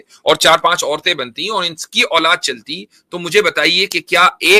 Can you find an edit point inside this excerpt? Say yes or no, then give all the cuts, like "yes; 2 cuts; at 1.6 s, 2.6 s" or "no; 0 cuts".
no; 0 cuts